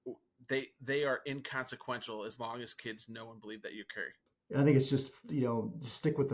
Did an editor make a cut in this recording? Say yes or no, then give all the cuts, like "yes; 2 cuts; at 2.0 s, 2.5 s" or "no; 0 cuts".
yes; 1 cut; at 4.3 s